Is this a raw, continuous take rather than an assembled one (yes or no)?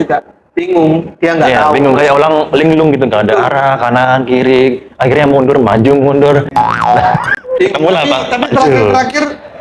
yes